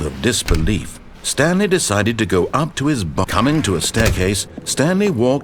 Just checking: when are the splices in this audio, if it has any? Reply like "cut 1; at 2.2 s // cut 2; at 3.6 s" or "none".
cut 1; at 3.3 s